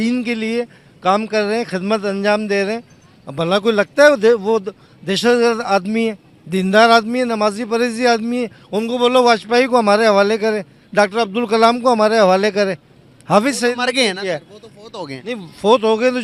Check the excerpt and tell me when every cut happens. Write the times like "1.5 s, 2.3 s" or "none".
none